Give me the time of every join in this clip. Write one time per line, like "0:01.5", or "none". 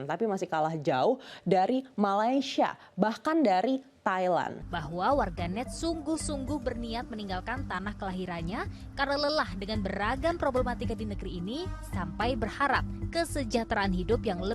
0:04.6